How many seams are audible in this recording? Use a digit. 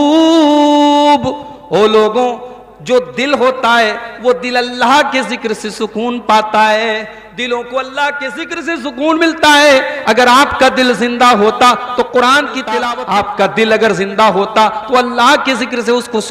1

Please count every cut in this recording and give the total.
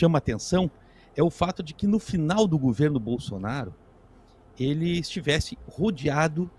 0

